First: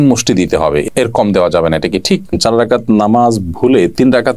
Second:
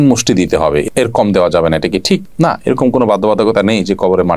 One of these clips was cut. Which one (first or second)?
first